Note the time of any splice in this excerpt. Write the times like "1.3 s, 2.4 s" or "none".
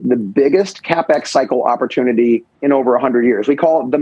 none